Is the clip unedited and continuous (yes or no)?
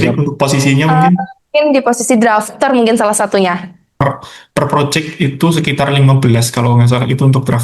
no